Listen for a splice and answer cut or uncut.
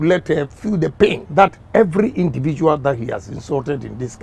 cut